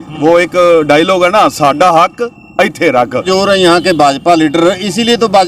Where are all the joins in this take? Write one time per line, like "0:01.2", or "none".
0:03.2